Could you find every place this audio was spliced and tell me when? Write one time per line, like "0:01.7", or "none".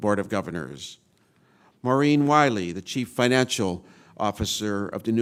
none